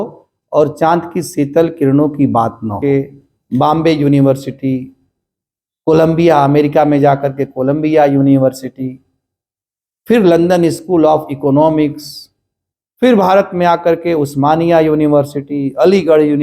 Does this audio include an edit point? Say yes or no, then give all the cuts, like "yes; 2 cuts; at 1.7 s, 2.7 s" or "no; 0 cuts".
yes; 1 cut; at 2.8 s